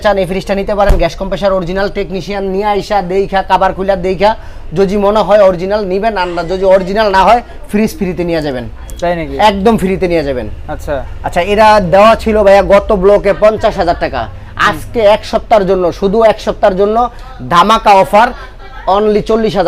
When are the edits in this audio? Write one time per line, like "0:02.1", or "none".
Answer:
none